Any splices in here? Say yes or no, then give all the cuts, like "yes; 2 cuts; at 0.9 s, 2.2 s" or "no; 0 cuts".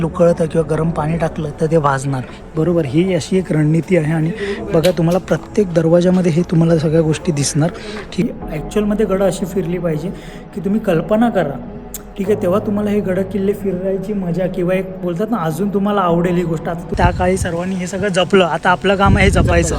yes; 2 cuts; at 8.2 s, 17.0 s